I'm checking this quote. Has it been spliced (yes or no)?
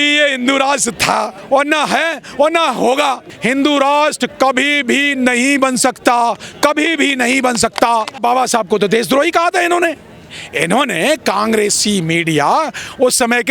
yes